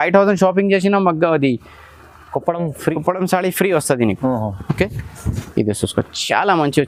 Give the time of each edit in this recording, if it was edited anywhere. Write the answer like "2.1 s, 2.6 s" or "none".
none

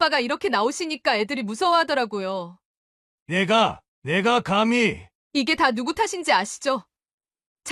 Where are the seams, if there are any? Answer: none

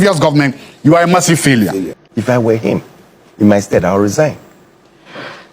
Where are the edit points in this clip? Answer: 2.0 s

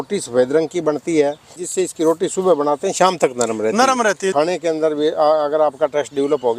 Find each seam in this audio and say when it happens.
1.6 s, 4.3 s

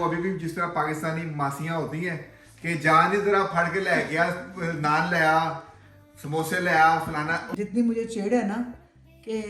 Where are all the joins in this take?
7.4 s

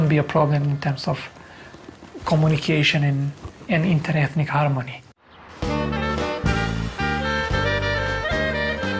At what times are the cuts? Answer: 3.5 s

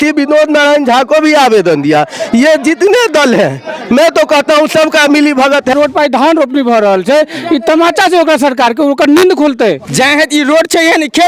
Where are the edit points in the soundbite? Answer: 5.7 s, 9.8 s

